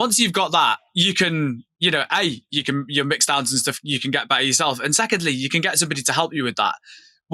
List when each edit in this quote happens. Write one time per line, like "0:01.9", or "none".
0:00.9
0:01.7